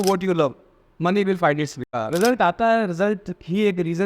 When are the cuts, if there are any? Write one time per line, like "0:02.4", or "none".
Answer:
0:01.8